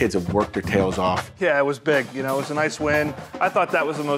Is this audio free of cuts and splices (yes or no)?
no